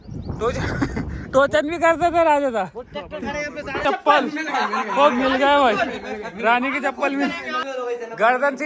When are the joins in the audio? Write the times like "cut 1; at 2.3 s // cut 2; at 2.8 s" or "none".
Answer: cut 1; at 3.8 s // cut 2; at 7.6 s